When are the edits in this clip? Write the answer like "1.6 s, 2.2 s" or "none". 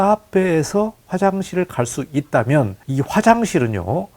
2.8 s